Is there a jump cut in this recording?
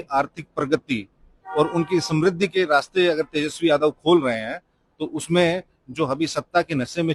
no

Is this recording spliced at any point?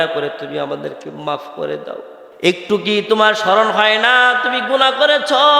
yes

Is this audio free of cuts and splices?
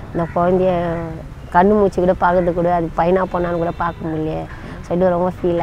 yes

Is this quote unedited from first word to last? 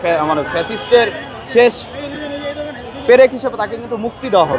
yes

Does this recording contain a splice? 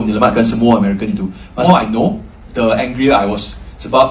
yes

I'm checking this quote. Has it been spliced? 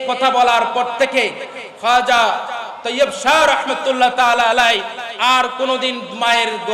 no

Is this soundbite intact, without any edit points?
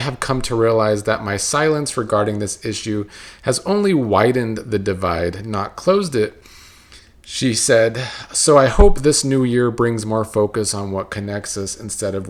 yes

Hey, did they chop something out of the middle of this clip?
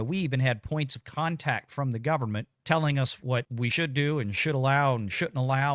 yes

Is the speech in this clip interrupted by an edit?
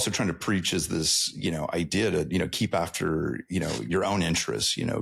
no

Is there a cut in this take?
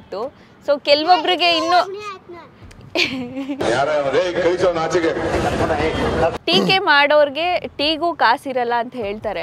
yes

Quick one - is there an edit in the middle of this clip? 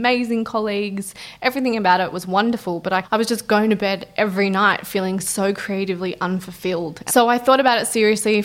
yes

